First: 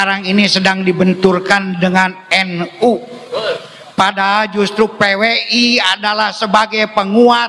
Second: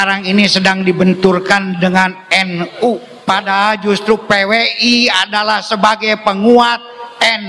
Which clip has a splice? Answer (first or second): second